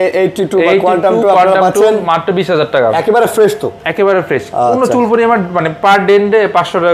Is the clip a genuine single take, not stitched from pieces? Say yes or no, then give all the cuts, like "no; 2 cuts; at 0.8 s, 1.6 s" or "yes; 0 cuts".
yes; 0 cuts